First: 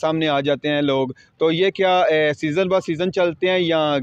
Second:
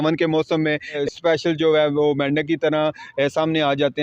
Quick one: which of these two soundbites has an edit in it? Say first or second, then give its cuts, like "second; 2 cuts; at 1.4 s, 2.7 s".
second; 1 cut; at 1.0 s